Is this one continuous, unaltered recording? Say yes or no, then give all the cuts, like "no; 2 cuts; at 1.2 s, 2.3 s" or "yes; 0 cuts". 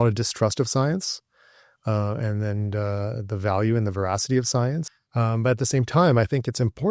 no; 1 cut; at 5.0 s